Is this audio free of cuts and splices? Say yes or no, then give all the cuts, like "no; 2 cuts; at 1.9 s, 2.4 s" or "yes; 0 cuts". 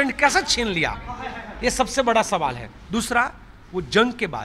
yes; 0 cuts